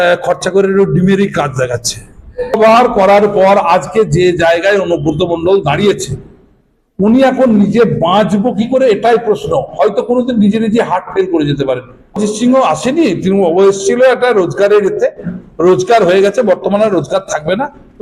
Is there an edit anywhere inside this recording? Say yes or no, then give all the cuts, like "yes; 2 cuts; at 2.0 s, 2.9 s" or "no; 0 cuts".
yes; 2 cuts; at 2.6 s, 12.2 s